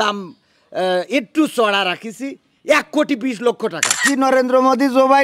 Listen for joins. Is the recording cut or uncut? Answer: cut